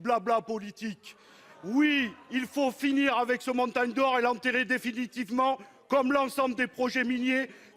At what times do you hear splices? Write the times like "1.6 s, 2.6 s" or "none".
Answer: none